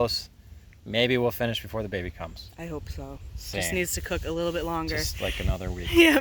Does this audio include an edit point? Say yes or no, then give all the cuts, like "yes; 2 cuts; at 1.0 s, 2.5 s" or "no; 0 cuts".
no; 0 cuts